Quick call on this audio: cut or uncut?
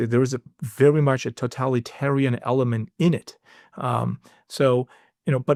uncut